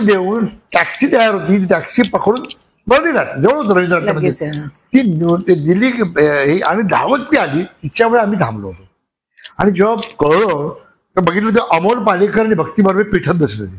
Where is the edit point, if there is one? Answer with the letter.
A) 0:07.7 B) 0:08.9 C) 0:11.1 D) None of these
D